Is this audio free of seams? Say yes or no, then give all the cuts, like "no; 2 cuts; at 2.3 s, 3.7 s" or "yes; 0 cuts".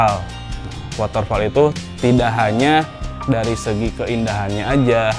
no; 1 cut; at 1.8 s